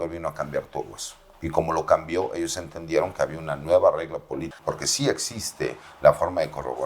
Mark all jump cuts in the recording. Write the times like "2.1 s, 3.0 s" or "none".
4.5 s